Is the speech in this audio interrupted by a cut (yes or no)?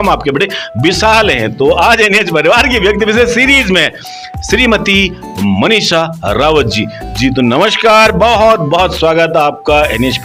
no